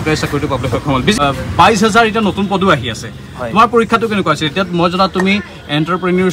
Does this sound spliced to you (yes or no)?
yes